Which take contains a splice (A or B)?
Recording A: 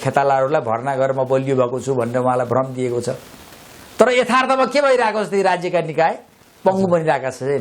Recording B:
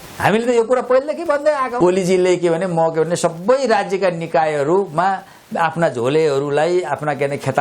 B